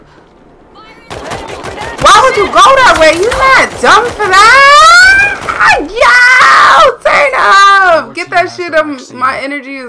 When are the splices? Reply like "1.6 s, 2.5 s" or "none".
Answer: 7.8 s